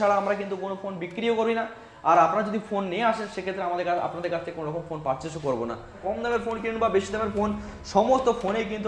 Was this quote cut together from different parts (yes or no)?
yes